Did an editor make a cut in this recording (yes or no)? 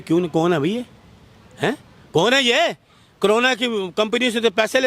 no